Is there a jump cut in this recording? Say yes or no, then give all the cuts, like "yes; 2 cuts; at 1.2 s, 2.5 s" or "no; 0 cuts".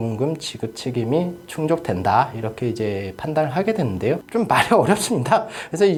no; 0 cuts